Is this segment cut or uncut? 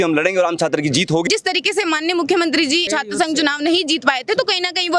cut